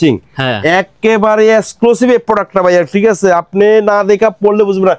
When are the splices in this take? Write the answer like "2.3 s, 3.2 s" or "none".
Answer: none